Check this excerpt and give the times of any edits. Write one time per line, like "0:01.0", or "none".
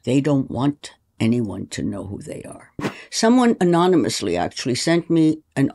0:03.0